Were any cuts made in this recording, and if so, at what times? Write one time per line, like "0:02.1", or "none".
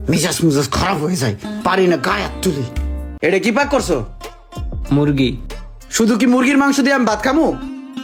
0:03.0

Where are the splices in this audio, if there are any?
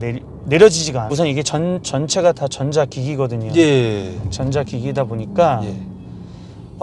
0:01.0

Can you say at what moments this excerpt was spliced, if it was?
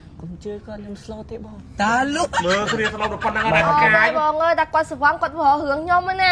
none

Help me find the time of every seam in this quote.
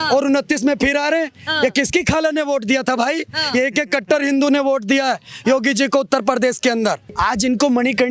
0:07.1

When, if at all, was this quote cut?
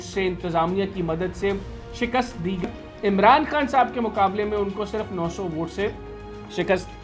0:02.6

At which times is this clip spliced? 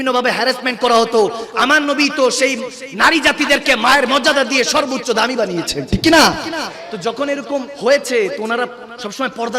0:07.7

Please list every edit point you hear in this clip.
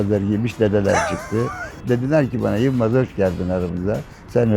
0:01.8

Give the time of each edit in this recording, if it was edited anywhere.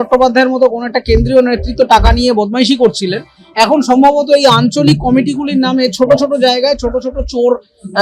none

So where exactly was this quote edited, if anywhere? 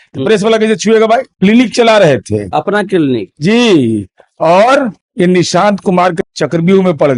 0:01.3
0:05.0
0:06.2

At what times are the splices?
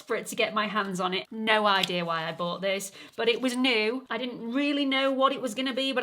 0:01.2
0:04.1

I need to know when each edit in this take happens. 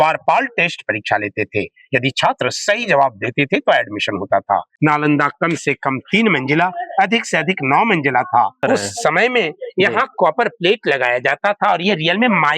0:04.7
0:08.6

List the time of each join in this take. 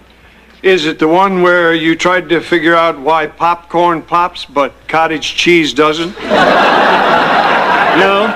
0:02.2

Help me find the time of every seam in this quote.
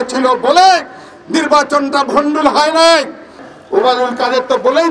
0:03.4

